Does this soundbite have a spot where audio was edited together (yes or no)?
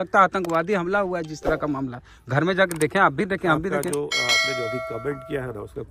no